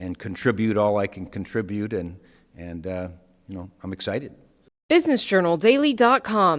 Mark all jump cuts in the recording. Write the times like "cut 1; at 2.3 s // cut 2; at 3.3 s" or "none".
cut 1; at 4.7 s